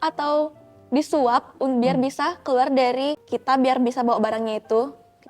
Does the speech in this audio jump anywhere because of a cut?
yes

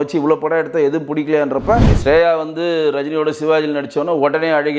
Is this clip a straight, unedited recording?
no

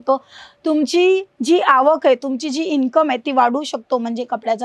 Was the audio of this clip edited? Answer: no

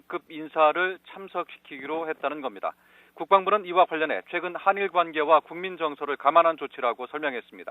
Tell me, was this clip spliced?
yes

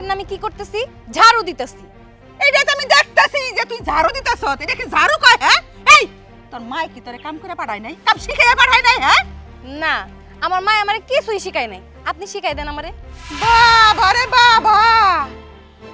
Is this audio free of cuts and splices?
yes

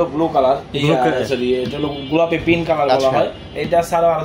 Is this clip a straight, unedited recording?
yes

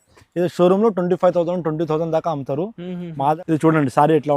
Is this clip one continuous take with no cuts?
no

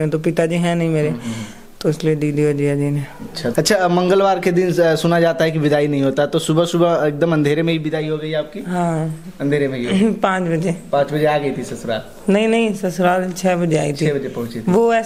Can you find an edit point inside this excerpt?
no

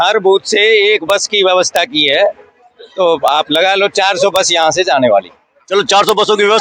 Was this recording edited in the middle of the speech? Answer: no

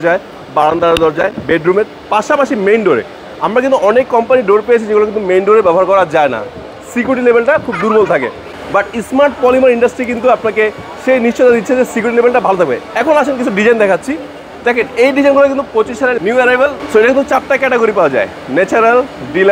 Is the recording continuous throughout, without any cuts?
yes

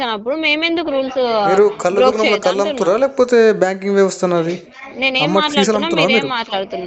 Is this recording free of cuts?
yes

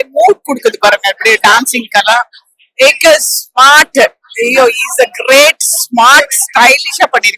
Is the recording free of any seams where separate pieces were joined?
yes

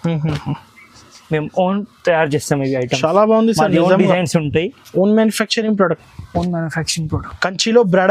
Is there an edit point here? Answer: no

